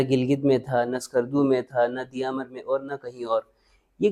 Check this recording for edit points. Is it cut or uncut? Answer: uncut